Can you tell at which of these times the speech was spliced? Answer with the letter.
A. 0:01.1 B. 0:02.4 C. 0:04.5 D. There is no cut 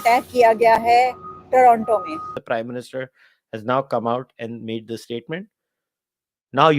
B